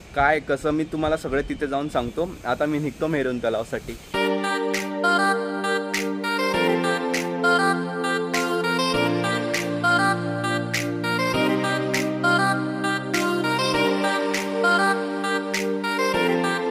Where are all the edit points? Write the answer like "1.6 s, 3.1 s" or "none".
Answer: none